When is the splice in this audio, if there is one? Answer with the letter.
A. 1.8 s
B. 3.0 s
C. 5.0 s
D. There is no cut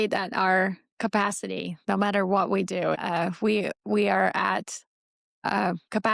B